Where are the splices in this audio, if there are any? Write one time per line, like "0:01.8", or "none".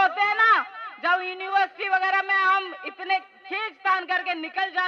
none

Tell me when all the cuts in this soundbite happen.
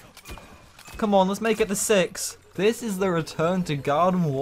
0:02.5

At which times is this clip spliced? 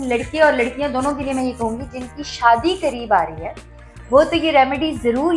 none

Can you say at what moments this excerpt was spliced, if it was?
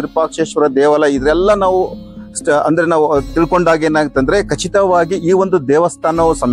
none

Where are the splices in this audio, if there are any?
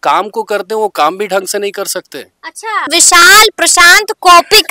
0:02.9

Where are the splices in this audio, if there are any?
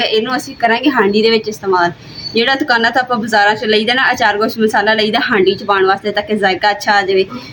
none

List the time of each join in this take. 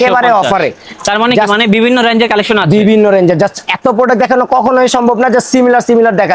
none

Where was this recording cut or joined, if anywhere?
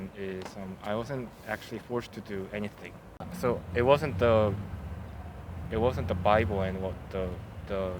0:03.2

